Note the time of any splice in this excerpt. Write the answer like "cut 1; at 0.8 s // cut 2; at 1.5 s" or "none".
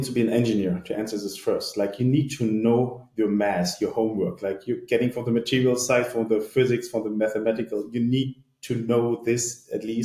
none